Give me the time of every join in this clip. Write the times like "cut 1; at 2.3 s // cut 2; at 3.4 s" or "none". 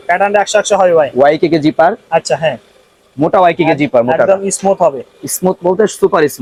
none

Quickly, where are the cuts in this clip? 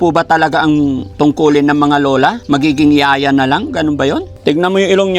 cut 1; at 1.0 s // cut 2; at 2.4 s // cut 3; at 4.3 s

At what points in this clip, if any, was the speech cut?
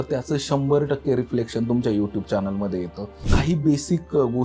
cut 1; at 3.3 s

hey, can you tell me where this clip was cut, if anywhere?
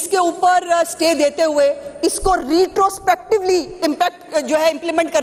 none

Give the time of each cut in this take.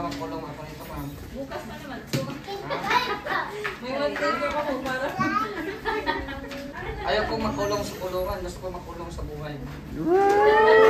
cut 1; at 6.7 s

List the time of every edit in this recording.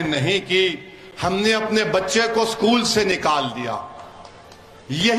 none

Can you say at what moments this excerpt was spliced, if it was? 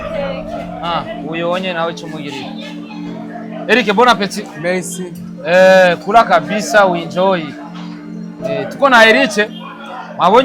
none

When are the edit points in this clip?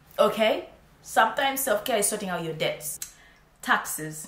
cut 1; at 3.3 s

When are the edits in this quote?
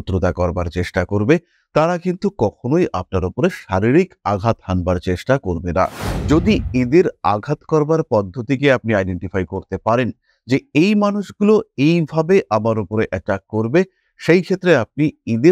cut 1; at 6.1 s

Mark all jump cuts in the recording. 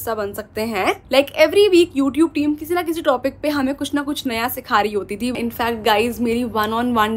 cut 1; at 1.0 s // cut 2; at 5.3 s

